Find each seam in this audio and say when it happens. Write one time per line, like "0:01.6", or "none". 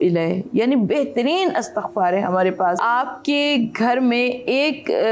0:02.8